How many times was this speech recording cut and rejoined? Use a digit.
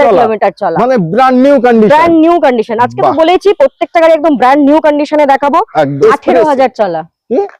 1